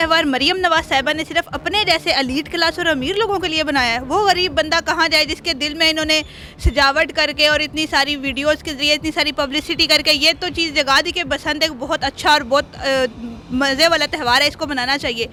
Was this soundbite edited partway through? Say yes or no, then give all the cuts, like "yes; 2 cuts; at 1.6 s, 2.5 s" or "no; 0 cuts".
no; 0 cuts